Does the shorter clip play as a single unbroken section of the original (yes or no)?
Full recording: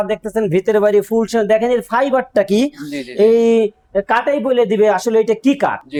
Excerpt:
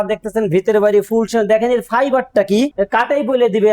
no